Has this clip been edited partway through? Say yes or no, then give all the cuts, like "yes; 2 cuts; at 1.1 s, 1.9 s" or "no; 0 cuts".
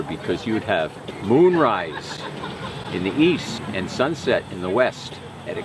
yes; 2 cuts; at 1.1 s, 3.6 s